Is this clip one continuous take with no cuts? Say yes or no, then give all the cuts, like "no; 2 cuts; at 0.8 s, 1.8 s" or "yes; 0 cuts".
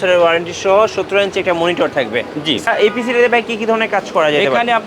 no; 1 cut; at 2.7 s